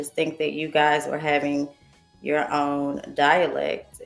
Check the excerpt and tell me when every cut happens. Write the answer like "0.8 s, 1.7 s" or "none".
none